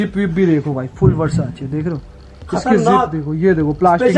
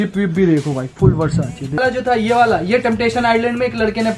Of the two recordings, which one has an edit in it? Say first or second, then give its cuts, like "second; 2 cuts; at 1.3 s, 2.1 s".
second; 1 cut; at 1.8 s